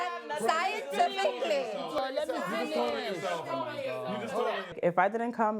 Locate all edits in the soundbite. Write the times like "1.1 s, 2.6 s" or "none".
4.5 s

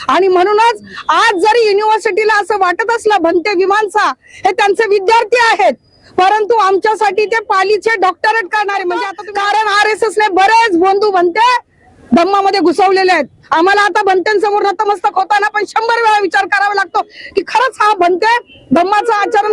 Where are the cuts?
9.2 s

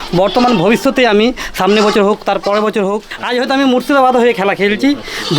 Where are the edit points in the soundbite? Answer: 3.1 s

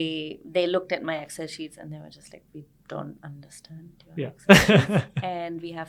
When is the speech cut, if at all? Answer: none

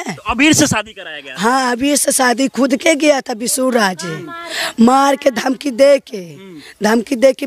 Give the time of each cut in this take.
none

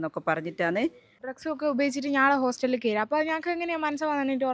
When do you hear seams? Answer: 1.2 s

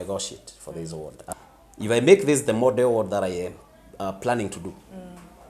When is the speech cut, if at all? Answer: 1.1 s

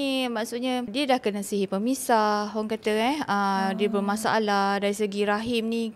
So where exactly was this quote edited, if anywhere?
0.9 s

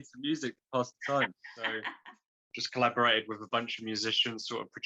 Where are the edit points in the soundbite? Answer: 1.9 s

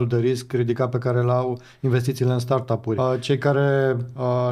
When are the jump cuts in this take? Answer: 3.0 s

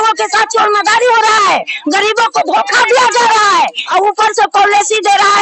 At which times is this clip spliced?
3.8 s

